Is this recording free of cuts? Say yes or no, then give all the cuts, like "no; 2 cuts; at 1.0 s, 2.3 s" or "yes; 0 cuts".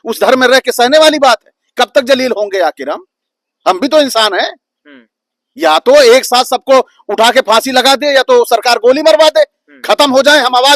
yes; 0 cuts